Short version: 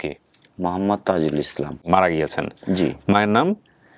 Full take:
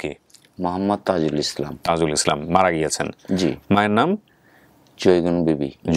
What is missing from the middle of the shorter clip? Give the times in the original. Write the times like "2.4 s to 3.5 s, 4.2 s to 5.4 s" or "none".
1.8 s to 2.4 s